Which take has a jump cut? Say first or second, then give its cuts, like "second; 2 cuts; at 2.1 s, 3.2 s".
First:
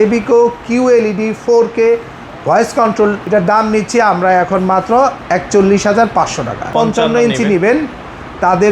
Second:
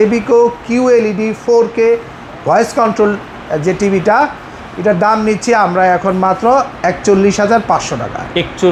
first; 2 cuts; at 3.2 s, 6.7 s